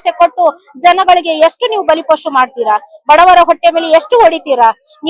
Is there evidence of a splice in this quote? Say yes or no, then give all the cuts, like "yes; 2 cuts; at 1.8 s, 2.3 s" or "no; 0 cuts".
no; 0 cuts